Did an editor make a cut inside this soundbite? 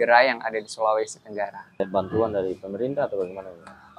yes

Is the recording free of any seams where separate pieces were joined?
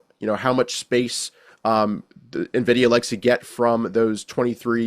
yes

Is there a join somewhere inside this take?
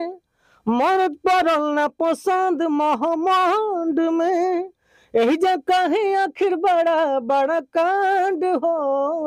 no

